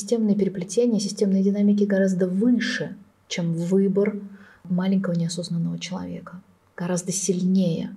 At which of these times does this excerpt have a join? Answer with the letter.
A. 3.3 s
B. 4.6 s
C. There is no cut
B